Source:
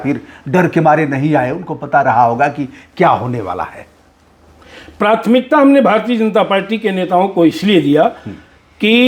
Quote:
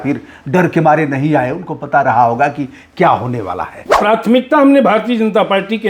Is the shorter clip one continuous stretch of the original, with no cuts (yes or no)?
no